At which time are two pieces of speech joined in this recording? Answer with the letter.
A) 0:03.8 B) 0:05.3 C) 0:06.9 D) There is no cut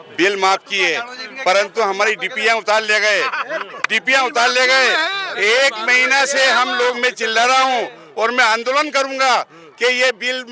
D